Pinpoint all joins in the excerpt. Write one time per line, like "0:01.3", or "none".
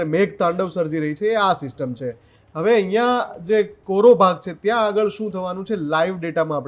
none